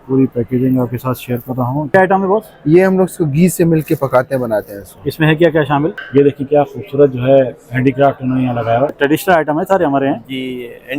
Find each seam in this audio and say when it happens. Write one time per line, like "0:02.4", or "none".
0:01.9
0:06.0
0:09.0